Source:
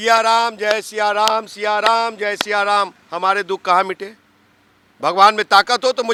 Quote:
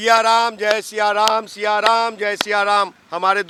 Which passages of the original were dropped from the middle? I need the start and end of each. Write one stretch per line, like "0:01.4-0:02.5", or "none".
none